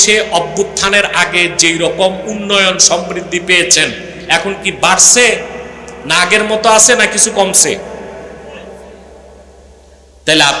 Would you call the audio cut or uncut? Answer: uncut